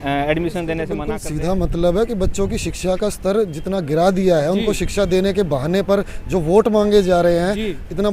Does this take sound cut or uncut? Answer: cut